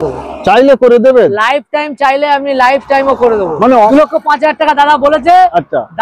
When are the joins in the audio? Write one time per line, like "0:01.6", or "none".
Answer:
0:03.9

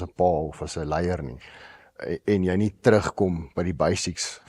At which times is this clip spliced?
none

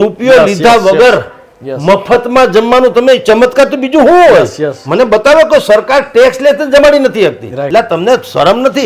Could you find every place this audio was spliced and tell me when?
0:07.6

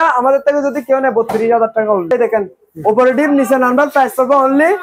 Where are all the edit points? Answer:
0:02.1

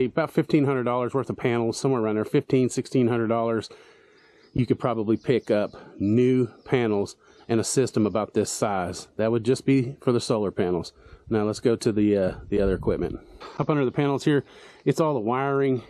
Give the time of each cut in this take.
none

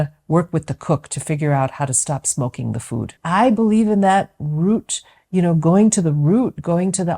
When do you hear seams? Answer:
0:03.2

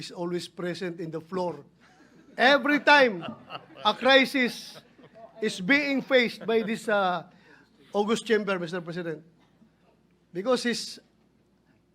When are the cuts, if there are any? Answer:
none

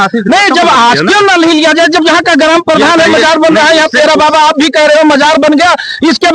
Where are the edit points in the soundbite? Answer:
none

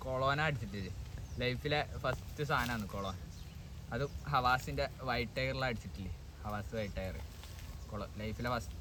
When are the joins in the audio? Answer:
none

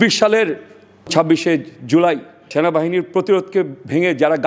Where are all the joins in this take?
0:01.1
0:02.5

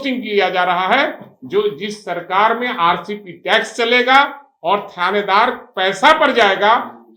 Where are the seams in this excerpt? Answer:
none

